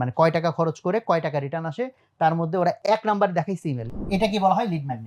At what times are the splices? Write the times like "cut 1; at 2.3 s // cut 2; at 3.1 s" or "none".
cut 1; at 2.8 s // cut 2; at 3.8 s